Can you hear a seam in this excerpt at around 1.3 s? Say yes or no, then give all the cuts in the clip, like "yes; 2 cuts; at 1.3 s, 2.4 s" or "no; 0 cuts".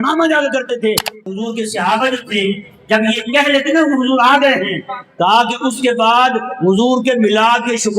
yes; 1 cut; at 1.3 s